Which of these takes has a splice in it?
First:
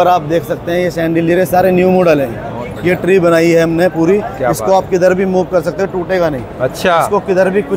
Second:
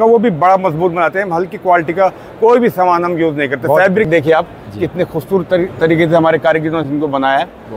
second; 1 cut; at 4.1 s

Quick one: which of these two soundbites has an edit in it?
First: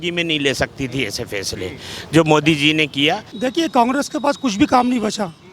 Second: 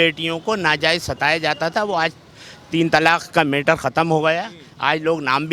first; 1 cut; at 3.3 s

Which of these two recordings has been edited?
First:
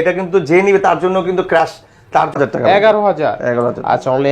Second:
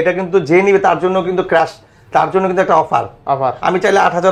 first; 1 cut; at 2.3 s

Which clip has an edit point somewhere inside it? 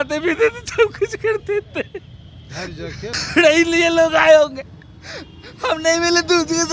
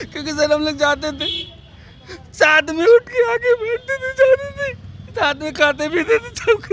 first; 1 cut; at 3.2 s

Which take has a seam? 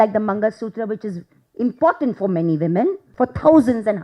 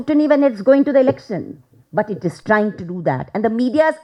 first; 1 cut; at 3.0 s

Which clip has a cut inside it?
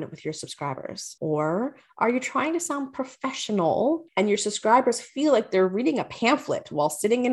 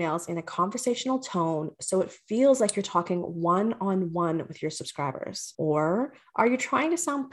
first; 1 cut; at 4.1 s

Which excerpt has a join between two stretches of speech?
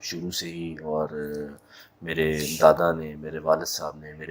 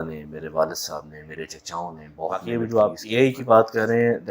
second; 1 cut; at 2.4 s

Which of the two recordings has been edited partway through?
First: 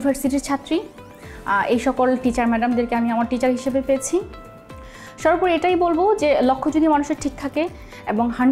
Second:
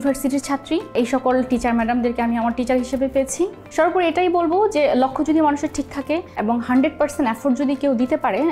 second; 3 cuts; at 0.9 s, 3.6 s, 6.3 s

